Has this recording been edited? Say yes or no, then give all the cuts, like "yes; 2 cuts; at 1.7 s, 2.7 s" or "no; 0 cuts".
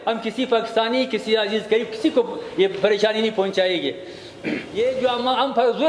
yes; 1 cut; at 4.6 s